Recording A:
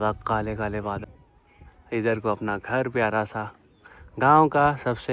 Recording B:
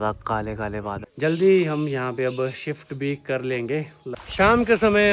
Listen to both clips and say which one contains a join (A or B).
B